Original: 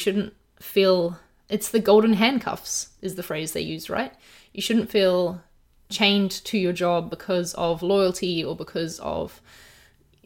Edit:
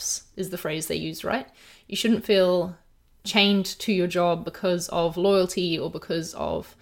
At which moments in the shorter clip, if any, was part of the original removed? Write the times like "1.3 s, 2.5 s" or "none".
none